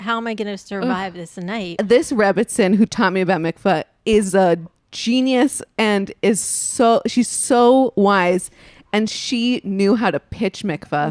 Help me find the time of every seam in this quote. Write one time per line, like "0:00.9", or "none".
0:01.8